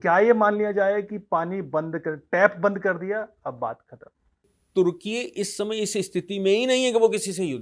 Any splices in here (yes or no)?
yes